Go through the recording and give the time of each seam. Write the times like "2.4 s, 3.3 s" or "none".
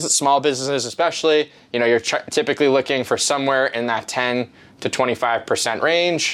none